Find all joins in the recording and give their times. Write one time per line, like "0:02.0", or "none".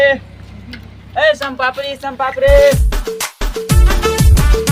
none